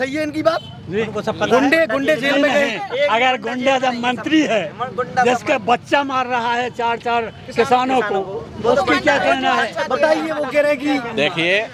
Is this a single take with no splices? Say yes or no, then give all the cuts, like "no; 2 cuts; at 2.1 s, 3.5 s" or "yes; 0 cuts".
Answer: yes; 0 cuts